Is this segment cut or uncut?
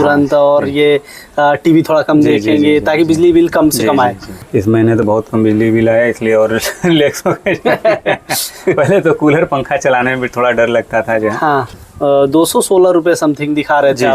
cut